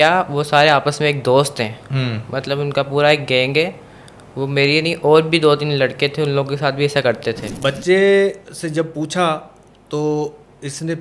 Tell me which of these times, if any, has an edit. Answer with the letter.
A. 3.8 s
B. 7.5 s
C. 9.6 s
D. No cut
B